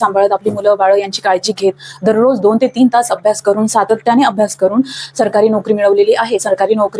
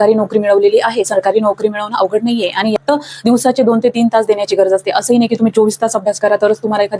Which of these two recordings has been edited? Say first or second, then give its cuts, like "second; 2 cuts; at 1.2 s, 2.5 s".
second; 1 cut; at 2.7 s